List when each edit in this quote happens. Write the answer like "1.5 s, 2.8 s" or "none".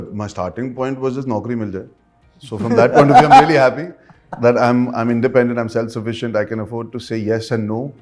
none